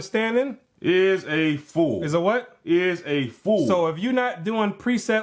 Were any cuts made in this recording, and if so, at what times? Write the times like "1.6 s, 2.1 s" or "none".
3.9 s